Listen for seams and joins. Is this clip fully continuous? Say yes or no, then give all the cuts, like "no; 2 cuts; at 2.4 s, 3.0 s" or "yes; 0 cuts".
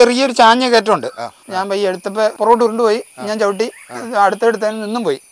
no; 2 cuts; at 1.4 s, 2.3 s